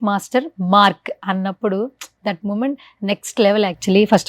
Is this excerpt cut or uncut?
cut